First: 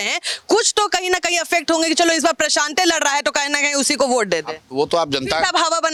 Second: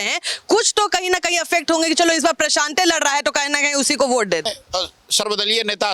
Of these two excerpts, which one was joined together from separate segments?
second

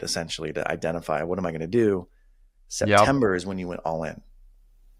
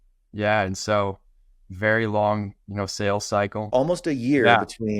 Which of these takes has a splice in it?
second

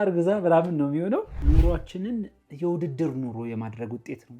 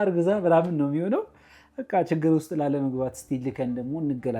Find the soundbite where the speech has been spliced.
first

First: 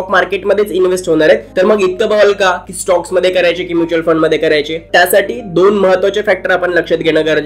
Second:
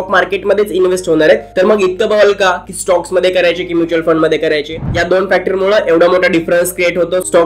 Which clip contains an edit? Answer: second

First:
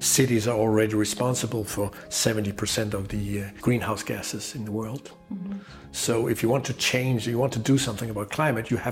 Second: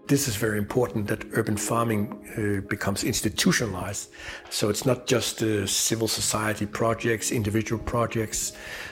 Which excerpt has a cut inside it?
second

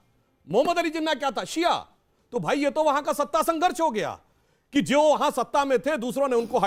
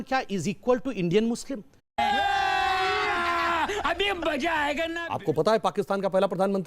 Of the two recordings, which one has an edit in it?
second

